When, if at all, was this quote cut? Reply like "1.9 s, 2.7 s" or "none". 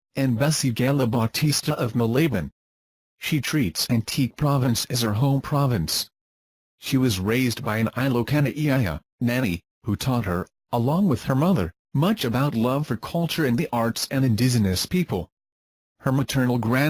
1.0 s